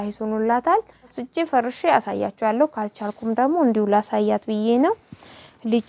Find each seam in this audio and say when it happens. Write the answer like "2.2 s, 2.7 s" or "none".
1.2 s